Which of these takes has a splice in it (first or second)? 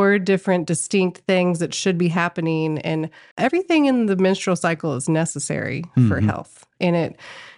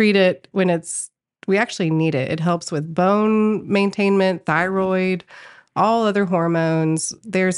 first